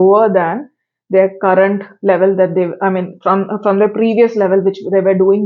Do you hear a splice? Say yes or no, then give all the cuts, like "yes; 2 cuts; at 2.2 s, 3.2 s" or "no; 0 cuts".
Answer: no; 0 cuts